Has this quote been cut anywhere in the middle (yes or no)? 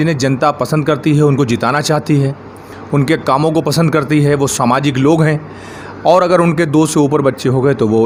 no